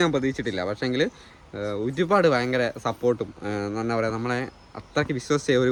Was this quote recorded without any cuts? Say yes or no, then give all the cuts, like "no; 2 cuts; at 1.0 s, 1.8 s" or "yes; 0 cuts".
yes; 0 cuts